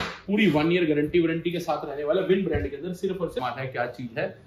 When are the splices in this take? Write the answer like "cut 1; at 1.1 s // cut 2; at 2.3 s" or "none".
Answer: cut 1; at 3.4 s